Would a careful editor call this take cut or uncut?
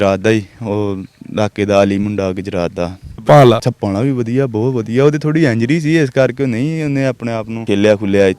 cut